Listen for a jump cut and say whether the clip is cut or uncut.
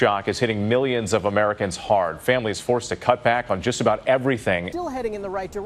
cut